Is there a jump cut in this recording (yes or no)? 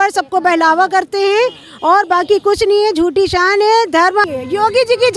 yes